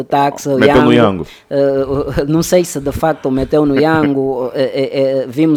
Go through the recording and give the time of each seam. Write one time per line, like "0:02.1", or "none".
none